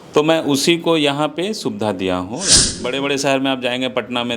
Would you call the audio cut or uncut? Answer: cut